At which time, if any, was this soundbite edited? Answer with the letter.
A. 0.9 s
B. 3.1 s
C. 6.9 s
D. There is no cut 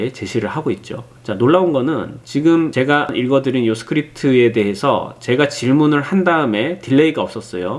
B